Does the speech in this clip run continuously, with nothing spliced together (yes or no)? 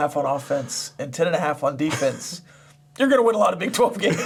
yes